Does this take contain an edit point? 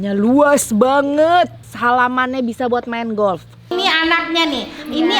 yes; 2 cuts; at 1.7 s, 3.7 s

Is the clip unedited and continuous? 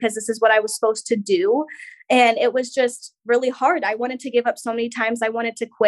yes; 0 cuts

